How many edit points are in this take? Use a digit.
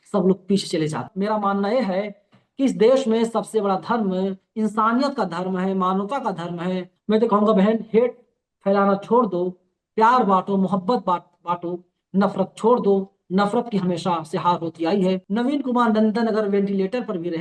3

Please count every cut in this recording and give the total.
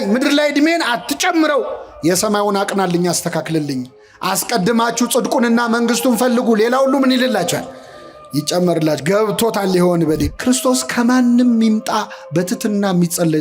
1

